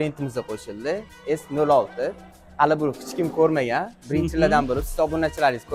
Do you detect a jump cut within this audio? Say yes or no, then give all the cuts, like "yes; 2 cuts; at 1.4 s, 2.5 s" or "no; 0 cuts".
no; 0 cuts